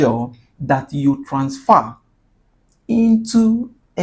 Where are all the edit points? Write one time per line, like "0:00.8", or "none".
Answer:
none